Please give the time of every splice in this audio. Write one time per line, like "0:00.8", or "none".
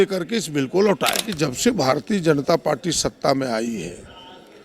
0:01.3